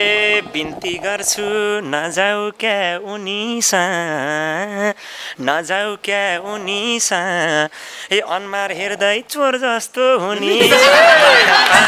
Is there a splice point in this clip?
no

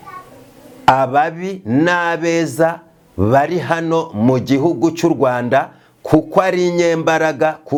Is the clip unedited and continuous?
yes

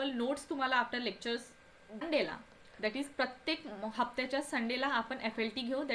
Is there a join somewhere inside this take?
yes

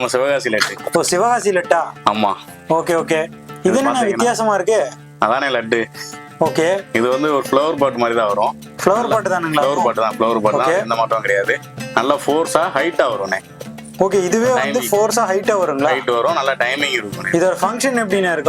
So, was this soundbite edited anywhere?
no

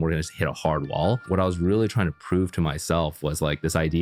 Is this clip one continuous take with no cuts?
no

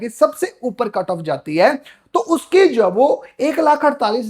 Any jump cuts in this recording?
no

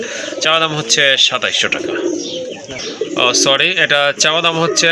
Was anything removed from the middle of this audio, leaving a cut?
no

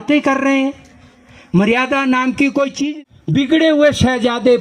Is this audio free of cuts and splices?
no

